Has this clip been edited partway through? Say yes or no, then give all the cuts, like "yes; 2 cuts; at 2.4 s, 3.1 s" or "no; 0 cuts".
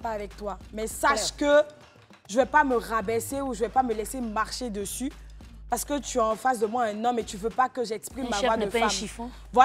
no; 0 cuts